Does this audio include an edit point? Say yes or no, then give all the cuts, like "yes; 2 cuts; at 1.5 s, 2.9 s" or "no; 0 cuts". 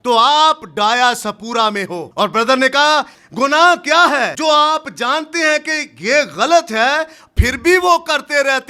yes; 3 cuts; at 2.0 s, 3.2 s, 4.3 s